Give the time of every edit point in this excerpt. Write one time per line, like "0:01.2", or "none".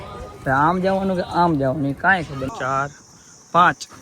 0:02.5